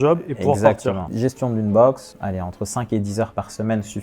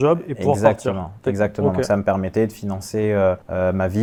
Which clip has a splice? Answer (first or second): first